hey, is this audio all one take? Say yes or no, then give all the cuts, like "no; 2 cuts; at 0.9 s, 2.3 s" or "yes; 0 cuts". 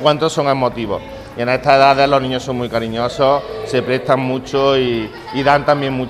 yes; 0 cuts